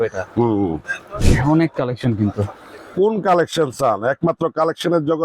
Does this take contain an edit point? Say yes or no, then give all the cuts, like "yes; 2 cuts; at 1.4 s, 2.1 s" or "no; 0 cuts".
yes; 1 cut; at 1.3 s